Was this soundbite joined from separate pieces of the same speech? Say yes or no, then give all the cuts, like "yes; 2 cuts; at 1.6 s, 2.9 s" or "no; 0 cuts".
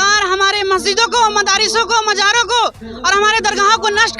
no; 0 cuts